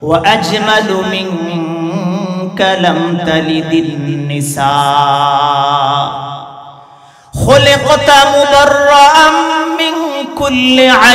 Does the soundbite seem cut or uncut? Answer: uncut